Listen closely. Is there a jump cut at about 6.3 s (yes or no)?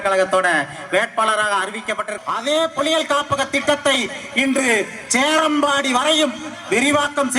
no